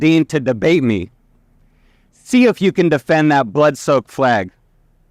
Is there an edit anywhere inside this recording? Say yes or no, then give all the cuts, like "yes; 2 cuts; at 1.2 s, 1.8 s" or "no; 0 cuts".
no; 0 cuts